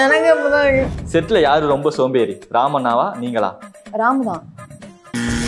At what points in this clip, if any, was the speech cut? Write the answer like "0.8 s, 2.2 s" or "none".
0.9 s

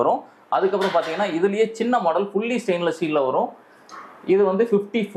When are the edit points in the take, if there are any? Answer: none

